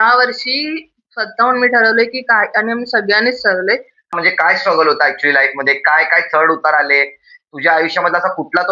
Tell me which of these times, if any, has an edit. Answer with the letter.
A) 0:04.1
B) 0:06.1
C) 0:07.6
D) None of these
A